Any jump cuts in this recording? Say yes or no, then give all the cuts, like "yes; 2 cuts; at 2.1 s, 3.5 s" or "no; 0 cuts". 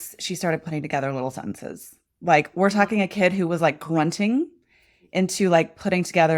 no; 0 cuts